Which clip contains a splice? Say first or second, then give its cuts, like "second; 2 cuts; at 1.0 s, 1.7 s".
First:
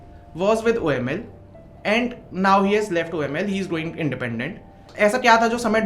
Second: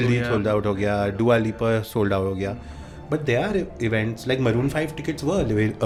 first; 1 cut; at 4.8 s